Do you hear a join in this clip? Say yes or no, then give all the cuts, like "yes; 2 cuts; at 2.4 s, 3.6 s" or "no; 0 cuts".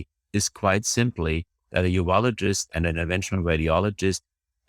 yes; 1 cut; at 2.7 s